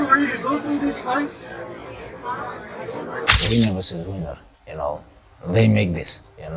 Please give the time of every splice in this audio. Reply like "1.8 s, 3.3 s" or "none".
3.1 s